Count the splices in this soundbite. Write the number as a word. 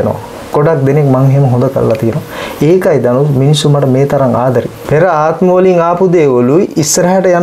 one